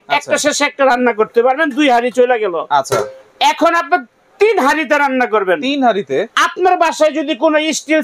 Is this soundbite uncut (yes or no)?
yes